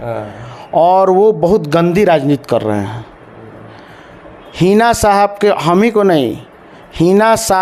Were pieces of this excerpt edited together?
no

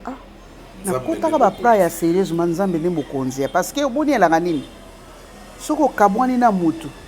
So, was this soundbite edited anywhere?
no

